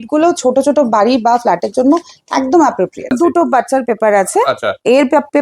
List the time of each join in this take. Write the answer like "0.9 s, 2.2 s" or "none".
3.1 s

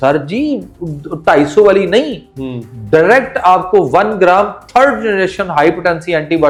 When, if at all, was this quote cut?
none

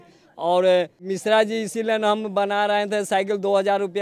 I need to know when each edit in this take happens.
1.1 s

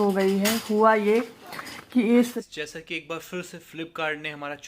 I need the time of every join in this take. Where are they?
2.2 s

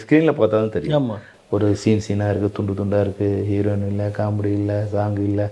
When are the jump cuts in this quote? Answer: 1.3 s

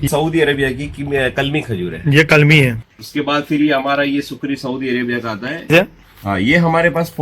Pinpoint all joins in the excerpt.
2.8 s, 5.7 s

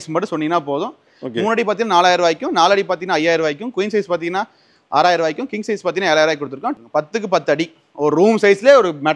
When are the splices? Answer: 1.1 s, 6.7 s

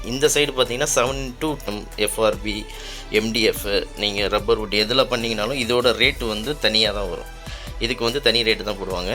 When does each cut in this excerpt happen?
1.7 s

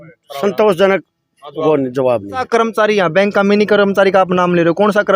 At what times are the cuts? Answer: 2.5 s

